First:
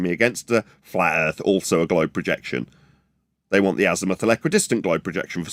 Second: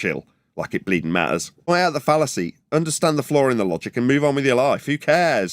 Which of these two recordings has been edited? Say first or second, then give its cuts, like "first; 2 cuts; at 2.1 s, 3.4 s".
second; 1 cut; at 1.7 s